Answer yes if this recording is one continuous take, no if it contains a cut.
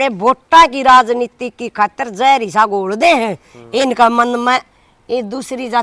yes